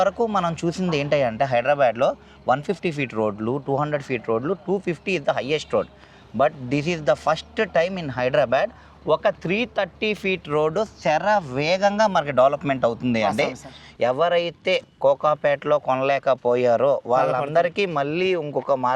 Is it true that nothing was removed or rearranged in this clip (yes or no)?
no